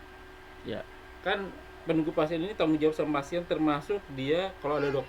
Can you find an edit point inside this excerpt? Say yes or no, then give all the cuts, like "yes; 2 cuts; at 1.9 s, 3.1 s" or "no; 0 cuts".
no; 0 cuts